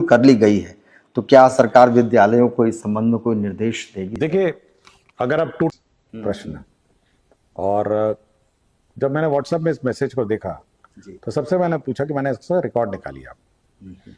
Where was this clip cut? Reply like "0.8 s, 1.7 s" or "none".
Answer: 5.7 s